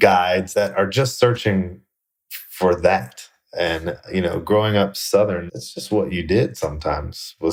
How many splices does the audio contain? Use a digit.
0